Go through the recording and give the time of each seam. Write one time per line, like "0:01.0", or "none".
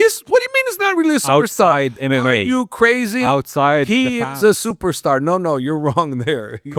none